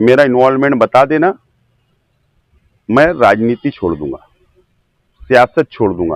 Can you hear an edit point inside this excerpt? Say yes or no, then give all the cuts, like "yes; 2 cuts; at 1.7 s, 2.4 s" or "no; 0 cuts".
no; 0 cuts